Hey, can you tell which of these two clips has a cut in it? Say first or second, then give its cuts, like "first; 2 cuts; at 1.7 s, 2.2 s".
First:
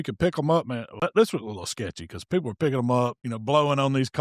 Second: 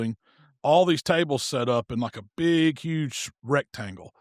first; 2 cuts; at 1.0 s, 3.3 s